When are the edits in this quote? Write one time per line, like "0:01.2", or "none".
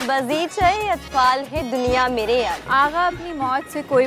0:02.6